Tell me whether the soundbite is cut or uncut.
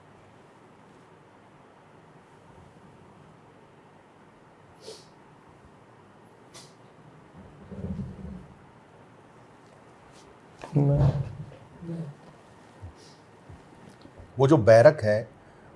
cut